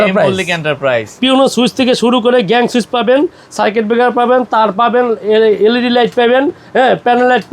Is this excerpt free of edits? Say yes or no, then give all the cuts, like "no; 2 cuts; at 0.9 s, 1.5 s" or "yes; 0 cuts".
no; 1 cut; at 1.1 s